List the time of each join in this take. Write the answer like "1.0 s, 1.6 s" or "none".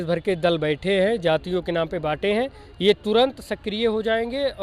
none

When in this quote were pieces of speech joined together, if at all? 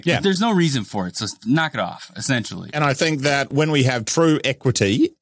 2.6 s

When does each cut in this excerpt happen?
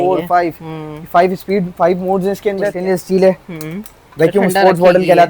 2.8 s

